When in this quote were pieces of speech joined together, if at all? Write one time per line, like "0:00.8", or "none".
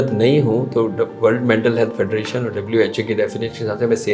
none